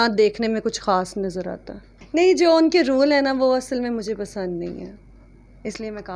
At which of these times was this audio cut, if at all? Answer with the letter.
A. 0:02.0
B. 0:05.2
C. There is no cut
A